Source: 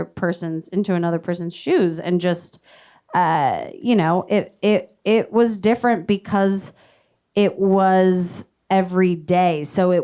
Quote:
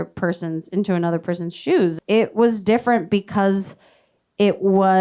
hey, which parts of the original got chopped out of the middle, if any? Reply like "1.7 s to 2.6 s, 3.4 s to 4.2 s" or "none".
2.0 s to 5.0 s